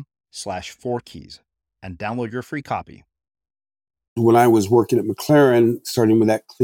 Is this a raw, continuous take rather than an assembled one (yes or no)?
no